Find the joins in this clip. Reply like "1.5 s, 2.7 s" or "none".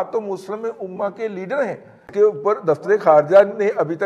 2.0 s